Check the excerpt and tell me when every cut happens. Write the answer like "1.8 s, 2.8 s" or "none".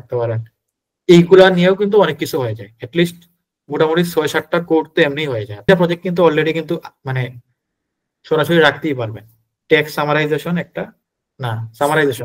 5.7 s